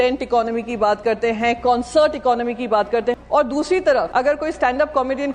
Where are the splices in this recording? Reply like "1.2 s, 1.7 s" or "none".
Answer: 3.2 s, 4.1 s